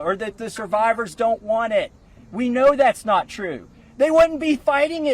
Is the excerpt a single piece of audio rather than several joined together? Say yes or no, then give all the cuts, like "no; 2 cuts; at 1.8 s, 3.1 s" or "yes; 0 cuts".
yes; 0 cuts